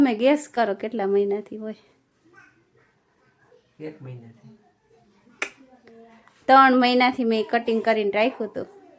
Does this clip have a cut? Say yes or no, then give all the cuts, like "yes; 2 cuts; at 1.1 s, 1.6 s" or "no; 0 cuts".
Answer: no; 0 cuts